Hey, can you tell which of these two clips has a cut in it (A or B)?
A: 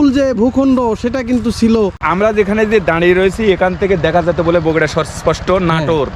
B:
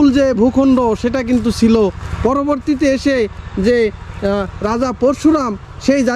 A